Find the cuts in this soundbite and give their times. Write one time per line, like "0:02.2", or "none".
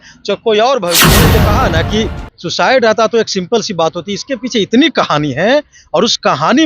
0:01.3